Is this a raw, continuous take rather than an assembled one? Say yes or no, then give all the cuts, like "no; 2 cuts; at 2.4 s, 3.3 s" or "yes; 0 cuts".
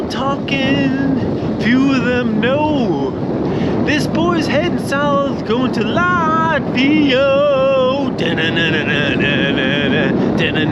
yes; 0 cuts